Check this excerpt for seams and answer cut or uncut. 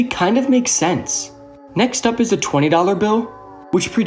uncut